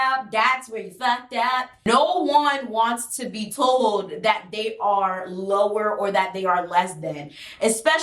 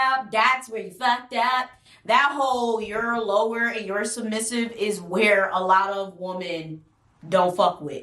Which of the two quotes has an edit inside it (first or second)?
first